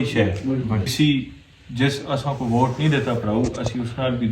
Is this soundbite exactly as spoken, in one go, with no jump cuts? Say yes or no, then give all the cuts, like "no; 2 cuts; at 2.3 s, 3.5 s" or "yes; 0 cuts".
no; 1 cut; at 0.9 s